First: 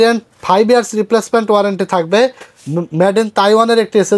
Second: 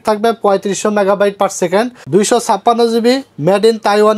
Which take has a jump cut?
second; 1 cut; at 2.0 s

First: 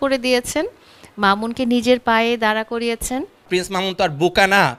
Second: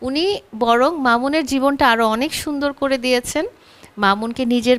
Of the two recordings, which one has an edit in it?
first; 1 cut; at 3.4 s

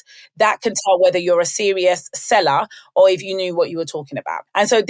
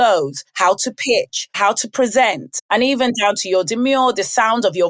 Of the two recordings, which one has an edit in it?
second; 2 cuts; at 1.5 s, 2.5 s

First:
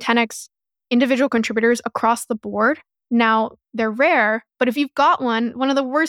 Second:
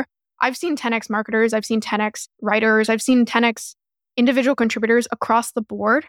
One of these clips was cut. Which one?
second; 1 cut; at 2.3 s

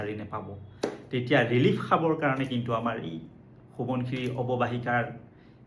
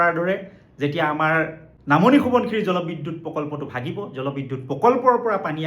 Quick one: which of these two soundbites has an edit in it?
second; 1 cut; at 1.7 s

